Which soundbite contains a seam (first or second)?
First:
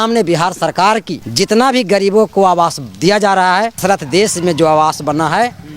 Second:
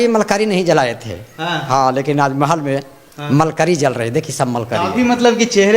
first